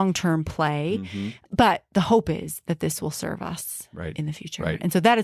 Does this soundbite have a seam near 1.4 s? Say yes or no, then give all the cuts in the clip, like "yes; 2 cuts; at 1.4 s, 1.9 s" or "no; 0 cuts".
yes; 1 cut; at 1.4 s